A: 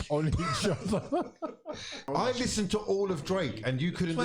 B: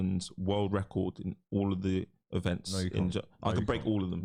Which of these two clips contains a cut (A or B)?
A